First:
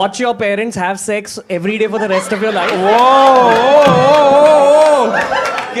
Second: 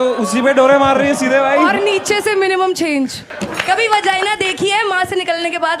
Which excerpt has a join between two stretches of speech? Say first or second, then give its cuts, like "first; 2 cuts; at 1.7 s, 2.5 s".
second; 1 cut; at 3.3 s